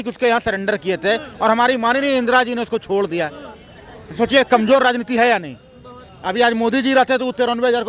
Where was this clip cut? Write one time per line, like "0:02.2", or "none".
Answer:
none